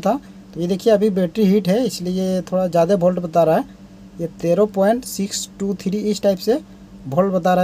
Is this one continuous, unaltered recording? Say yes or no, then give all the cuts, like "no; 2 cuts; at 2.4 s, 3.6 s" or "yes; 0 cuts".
yes; 0 cuts